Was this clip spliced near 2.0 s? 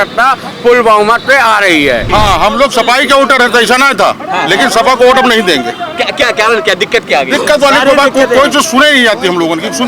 yes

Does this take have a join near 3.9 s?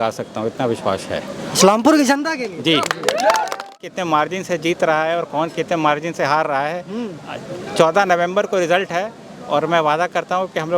yes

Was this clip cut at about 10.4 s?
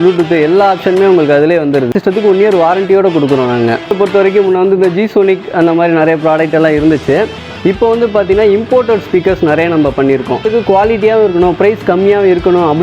yes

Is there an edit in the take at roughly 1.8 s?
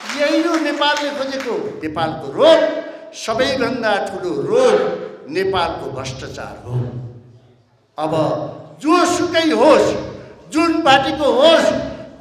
yes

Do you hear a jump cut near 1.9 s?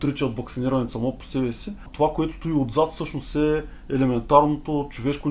yes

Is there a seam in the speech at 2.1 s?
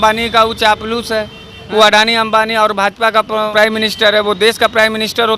no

